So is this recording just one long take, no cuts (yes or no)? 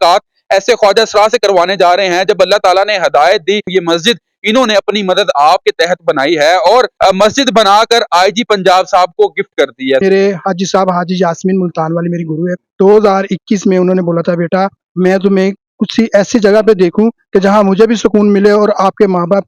no